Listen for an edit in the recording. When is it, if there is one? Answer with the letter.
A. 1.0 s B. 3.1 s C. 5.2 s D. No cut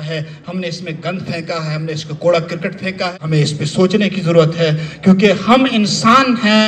B